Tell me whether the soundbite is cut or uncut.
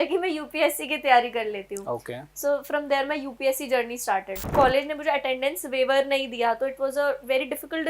cut